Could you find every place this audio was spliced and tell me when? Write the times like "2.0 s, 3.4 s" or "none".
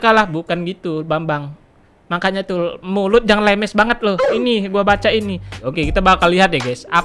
5.6 s